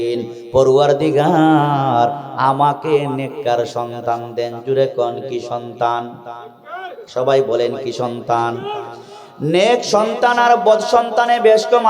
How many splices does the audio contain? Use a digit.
0